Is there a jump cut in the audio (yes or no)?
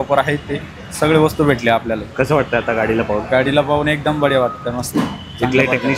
no